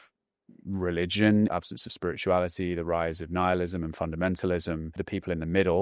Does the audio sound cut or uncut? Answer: cut